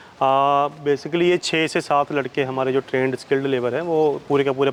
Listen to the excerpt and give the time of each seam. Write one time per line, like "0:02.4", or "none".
none